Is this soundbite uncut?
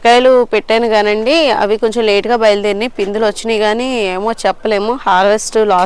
yes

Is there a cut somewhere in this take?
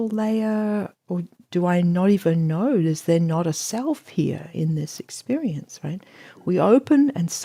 no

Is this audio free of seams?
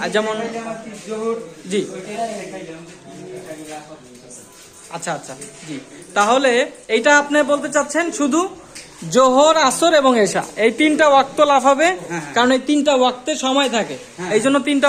yes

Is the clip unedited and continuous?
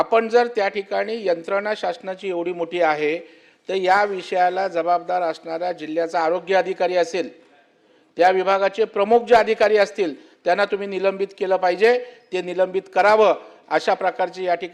yes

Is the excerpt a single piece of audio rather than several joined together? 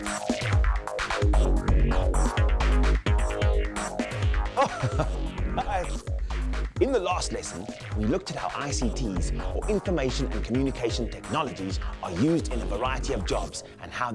no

